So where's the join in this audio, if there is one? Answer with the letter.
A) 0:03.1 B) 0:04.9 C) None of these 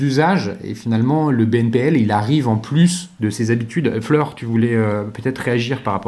A